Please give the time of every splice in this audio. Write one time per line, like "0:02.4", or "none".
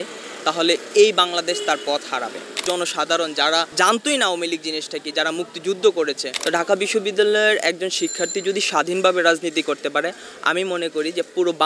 0:02.6
0:06.3